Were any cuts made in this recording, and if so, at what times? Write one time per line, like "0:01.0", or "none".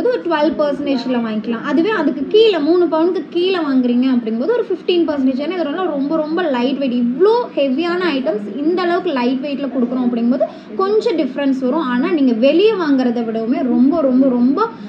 none